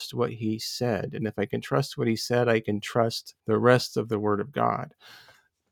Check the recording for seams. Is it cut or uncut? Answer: cut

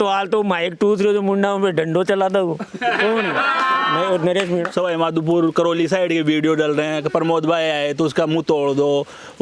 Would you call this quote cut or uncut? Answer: cut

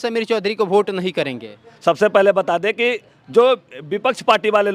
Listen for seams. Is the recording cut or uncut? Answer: uncut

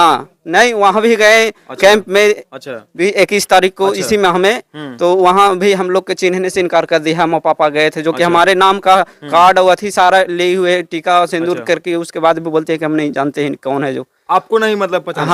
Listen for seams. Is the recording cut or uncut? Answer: uncut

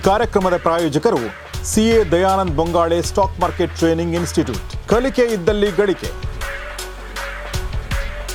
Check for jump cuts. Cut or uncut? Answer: uncut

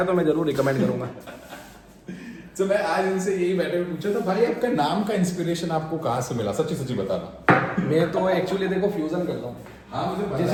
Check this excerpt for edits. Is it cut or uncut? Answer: uncut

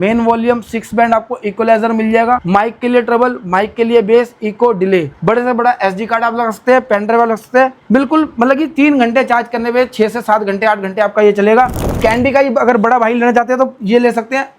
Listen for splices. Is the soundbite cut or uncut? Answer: cut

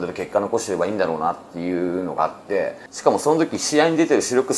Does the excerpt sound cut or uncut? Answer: cut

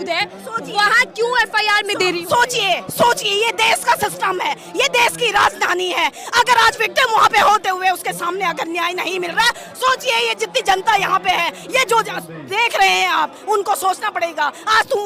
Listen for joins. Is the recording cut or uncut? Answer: uncut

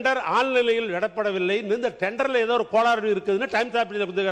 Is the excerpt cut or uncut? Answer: uncut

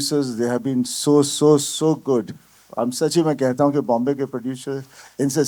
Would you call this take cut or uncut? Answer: uncut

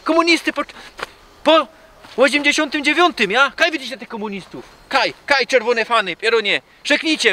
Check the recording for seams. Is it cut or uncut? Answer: uncut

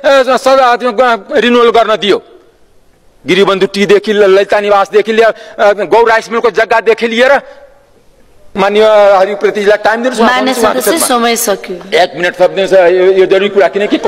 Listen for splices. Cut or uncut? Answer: cut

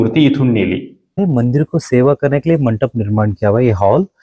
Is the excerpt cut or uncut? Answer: cut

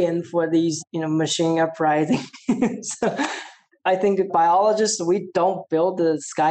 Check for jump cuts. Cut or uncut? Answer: uncut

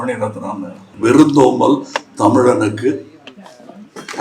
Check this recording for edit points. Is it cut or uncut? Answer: cut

